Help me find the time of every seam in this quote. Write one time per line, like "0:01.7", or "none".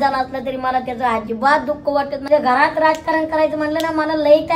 0:02.2